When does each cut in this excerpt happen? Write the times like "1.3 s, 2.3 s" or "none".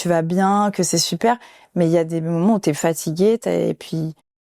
none